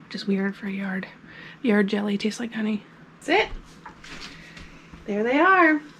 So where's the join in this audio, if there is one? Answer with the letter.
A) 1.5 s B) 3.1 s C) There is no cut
C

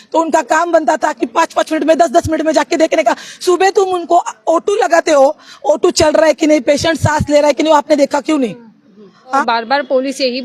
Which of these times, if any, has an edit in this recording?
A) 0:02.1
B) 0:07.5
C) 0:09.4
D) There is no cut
C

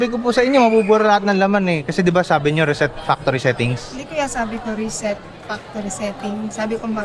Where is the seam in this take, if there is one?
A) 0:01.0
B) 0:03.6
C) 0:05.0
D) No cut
D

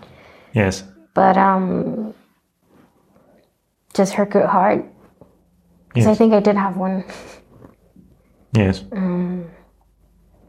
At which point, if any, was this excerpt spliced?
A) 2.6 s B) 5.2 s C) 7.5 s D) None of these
A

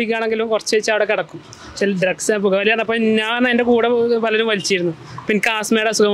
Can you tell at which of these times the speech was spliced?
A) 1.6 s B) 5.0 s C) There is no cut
C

